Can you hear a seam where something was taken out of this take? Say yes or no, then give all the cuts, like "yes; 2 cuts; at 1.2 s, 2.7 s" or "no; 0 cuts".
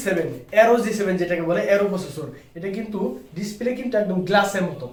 no; 0 cuts